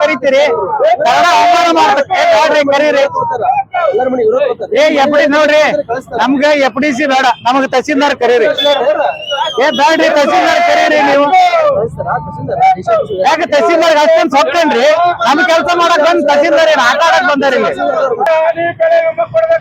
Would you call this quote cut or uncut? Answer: cut